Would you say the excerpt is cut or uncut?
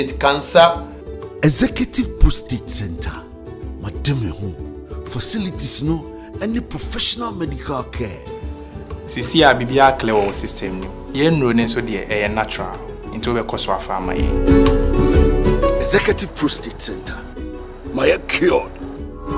uncut